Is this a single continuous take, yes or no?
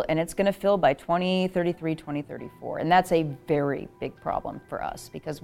yes